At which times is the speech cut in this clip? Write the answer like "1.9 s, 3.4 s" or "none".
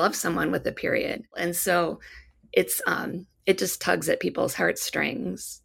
1.4 s